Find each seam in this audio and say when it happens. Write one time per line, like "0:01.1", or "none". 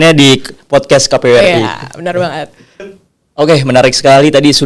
none